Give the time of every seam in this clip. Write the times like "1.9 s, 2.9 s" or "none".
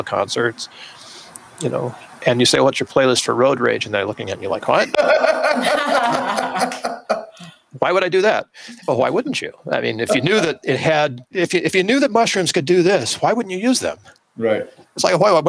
11.3 s